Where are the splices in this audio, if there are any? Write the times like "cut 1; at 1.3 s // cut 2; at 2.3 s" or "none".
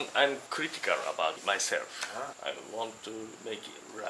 cut 1; at 1.4 s